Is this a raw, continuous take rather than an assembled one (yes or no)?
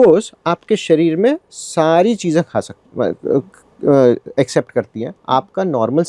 yes